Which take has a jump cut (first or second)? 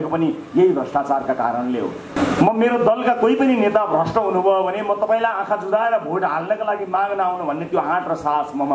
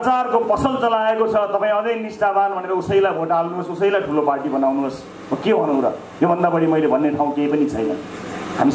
first